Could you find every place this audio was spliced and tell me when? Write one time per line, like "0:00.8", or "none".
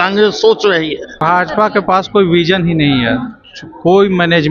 0:01.2